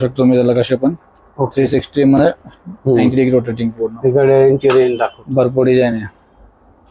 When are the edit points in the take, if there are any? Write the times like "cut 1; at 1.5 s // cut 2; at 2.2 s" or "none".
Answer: none